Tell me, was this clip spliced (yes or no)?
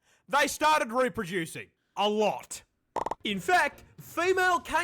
yes